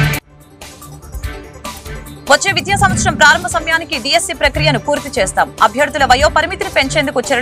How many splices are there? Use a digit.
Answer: 1